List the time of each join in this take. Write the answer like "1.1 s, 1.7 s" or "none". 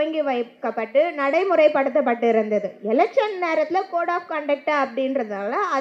none